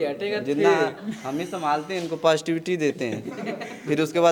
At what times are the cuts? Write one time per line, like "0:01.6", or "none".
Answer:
none